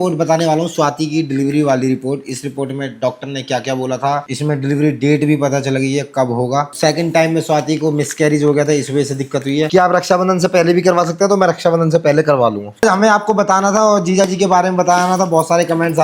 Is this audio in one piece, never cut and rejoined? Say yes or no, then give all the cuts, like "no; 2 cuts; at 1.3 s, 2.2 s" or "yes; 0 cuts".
no; 4 cuts; at 4.2 s, 6.7 s, 9.7 s, 12.8 s